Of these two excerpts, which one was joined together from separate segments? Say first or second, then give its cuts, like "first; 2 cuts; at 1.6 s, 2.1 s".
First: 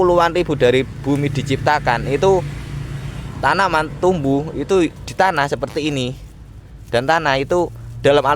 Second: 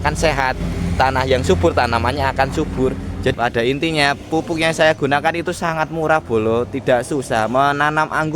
second; 1 cut; at 3.3 s